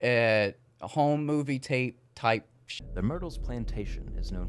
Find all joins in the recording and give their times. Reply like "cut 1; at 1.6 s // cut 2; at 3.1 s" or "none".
cut 1; at 2.6 s